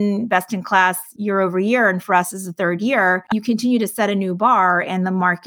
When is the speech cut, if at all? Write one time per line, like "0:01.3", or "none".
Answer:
0:01.1
0:03.2